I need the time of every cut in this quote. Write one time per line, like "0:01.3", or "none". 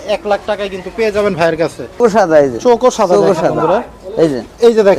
0:02.0